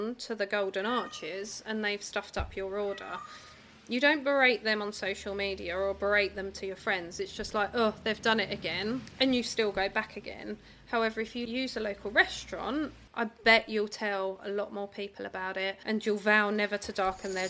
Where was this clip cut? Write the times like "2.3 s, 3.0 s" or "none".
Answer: 9.1 s, 11.5 s, 13.0 s, 15.8 s